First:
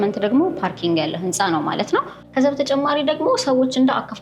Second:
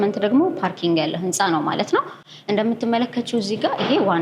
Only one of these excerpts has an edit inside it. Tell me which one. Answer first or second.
first